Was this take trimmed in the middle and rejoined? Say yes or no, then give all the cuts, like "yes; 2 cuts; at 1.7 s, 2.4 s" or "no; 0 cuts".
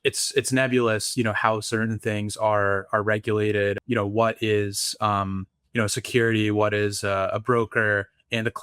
yes; 1 cut; at 3.8 s